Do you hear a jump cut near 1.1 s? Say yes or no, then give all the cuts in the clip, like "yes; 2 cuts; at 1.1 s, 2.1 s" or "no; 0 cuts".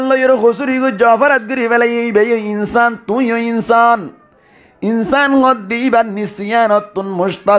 no; 0 cuts